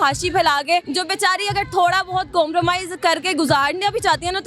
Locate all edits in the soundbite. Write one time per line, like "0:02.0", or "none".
0:00.9